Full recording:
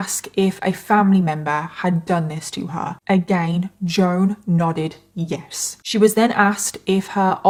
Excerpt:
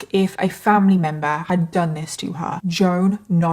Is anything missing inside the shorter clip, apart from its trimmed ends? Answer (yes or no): yes